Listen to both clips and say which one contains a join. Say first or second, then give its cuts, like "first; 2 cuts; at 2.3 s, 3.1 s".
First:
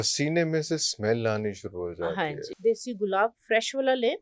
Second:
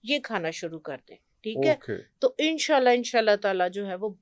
first; 1 cut; at 2.5 s